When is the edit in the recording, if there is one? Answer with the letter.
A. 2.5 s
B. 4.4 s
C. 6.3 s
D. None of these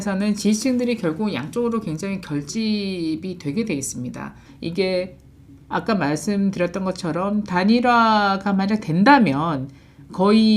B